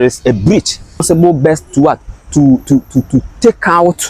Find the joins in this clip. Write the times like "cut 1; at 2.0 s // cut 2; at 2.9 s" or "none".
cut 1; at 1.0 s